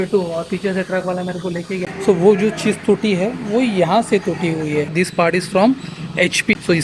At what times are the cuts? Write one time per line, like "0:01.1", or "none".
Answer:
0:01.8
0:04.9